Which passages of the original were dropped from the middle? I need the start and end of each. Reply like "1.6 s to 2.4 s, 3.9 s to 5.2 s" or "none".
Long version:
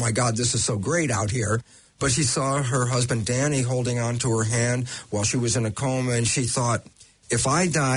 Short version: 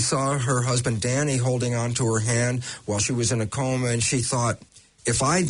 none

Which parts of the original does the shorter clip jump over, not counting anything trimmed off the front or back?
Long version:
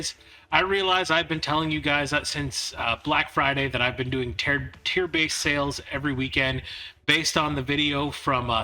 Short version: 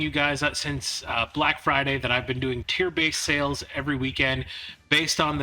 4.4 s to 4.8 s

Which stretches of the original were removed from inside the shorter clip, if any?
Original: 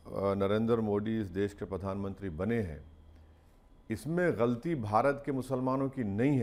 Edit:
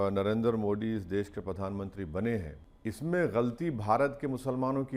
2.9 s to 3.7 s

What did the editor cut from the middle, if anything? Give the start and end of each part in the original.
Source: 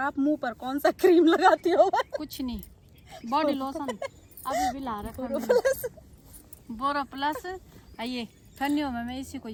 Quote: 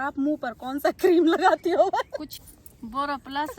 2.3 s to 6.2 s

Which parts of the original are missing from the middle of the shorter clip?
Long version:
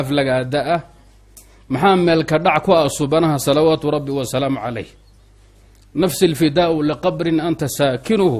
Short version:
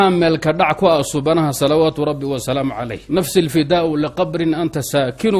4.8 s to 5.8 s

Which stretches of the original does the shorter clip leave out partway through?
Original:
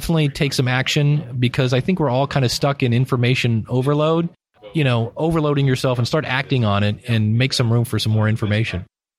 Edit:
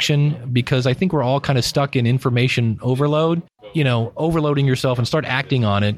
4.4 s to 4.6 s

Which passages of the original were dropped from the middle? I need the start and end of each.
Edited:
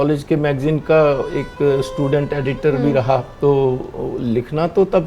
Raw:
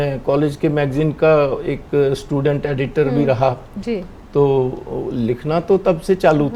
3.6 s to 4.2 s

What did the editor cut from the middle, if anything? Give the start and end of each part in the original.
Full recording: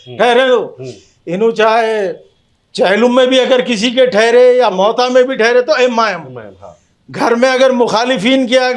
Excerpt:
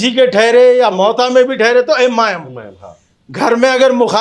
none

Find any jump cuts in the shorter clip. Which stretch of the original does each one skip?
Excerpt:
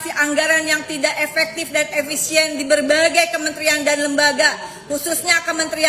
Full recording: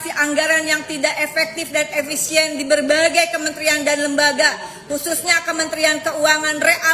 none

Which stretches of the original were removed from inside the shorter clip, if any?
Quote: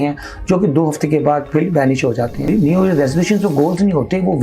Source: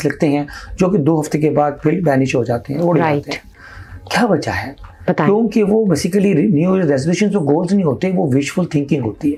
2.8 s to 6.4 s

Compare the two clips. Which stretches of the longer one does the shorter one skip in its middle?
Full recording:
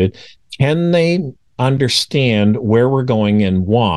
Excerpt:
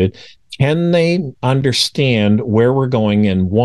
1.3 s to 1.5 s

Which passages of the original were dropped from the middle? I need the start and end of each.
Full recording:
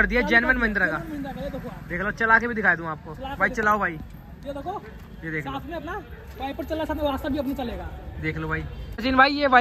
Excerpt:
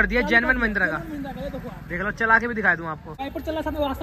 3.1 s to 6.3 s

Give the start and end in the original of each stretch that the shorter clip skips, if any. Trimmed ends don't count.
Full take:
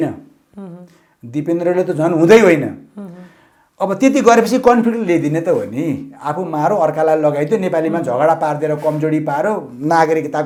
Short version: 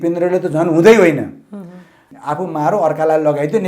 3.6 s to 6.1 s

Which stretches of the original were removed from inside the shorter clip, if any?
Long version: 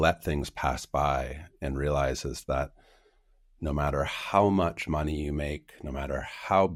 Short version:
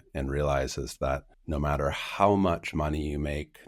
2.8 s to 3.5 s

